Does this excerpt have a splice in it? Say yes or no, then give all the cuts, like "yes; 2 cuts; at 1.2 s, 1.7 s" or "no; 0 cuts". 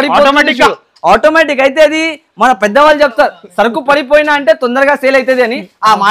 no; 0 cuts